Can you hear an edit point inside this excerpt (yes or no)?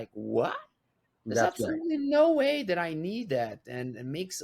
no